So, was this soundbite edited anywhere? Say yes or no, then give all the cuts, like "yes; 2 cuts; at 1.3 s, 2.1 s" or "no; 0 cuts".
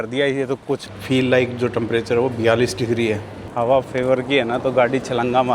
yes; 2 cuts; at 0.9 s, 3.4 s